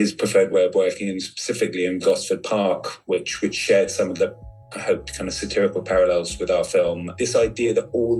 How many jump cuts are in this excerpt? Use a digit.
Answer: 1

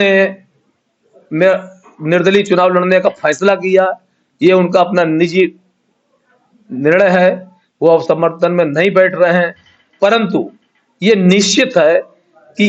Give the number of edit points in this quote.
0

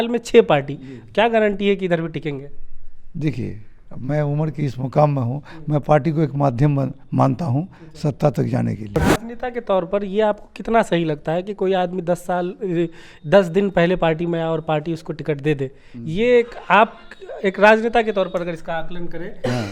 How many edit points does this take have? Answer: 1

